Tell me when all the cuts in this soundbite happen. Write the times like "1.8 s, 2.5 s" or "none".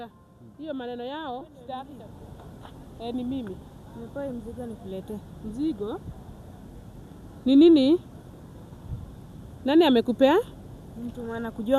2.0 s